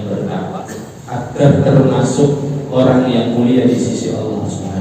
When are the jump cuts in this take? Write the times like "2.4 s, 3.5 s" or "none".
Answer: 0.9 s